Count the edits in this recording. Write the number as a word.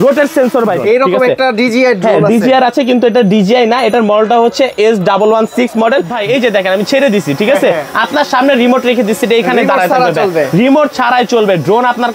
two